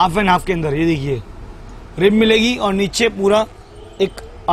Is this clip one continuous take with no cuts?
yes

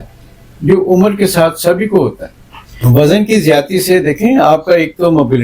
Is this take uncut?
no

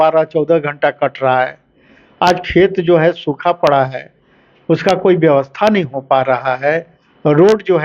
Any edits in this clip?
no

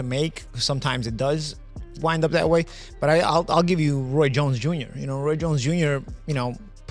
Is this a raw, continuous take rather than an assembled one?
yes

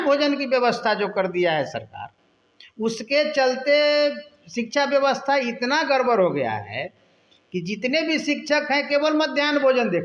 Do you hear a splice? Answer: no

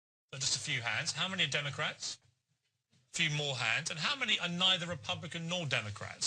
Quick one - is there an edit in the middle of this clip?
no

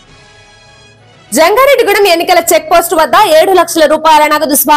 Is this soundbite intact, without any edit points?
no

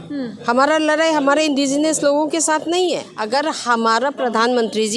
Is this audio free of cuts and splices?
no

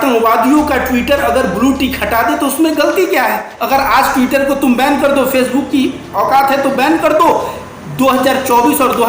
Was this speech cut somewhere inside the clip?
yes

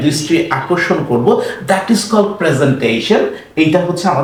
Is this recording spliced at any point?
no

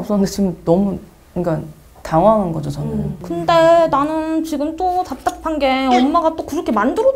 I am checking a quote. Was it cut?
no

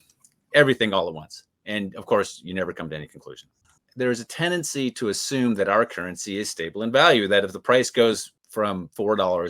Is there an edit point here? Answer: yes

